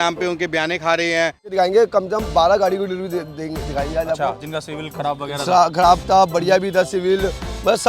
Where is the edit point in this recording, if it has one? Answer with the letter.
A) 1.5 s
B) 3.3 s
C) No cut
A